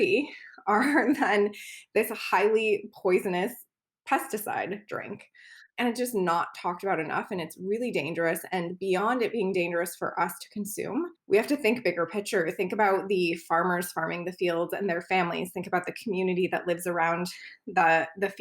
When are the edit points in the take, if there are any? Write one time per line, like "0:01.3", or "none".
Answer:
0:05.6
0:11.2